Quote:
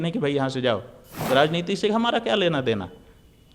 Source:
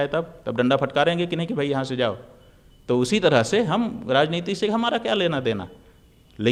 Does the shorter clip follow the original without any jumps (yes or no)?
no